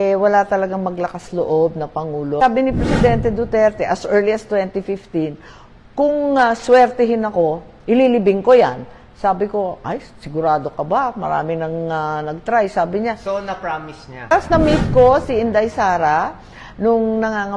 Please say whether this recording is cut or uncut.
cut